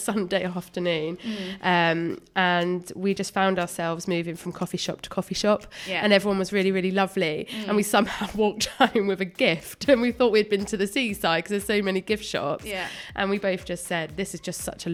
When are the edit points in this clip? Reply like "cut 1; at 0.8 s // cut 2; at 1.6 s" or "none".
none